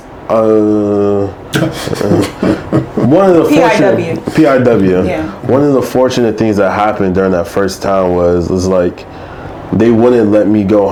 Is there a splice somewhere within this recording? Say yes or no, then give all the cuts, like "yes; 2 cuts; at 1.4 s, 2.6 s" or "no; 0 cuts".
no; 0 cuts